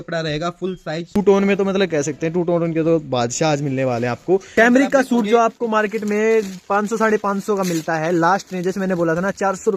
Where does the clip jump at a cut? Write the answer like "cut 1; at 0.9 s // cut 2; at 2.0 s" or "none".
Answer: cut 1; at 1.2 s // cut 2; at 4.5 s